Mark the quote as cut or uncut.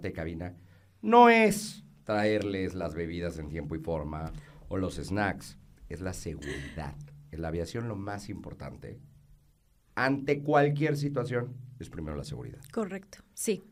uncut